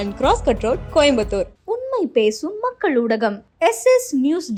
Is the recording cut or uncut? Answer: uncut